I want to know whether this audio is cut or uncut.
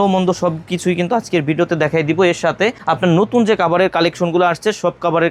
uncut